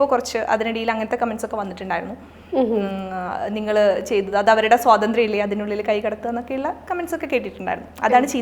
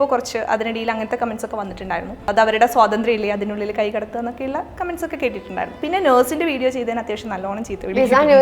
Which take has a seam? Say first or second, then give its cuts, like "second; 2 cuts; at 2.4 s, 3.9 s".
second; 2 cuts; at 2.3 s, 5.8 s